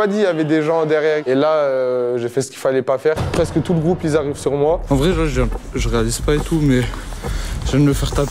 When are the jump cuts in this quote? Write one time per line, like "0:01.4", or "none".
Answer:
0:01.2
0:04.8